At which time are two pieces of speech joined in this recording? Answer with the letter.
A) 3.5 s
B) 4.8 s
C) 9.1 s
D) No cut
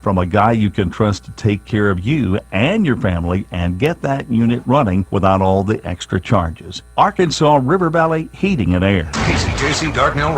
C